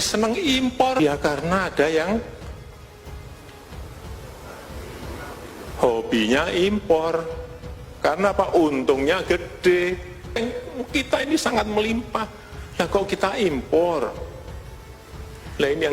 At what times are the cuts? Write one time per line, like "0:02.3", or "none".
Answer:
0:01.0
0:10.4

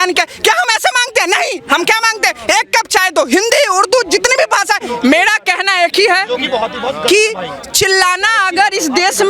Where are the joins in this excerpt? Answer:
0:04.9

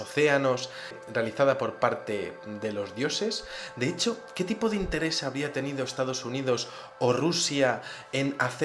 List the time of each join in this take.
0:02.8

